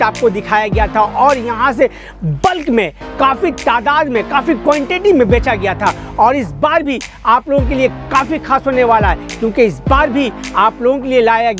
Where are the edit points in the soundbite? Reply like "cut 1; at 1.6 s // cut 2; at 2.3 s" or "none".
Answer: none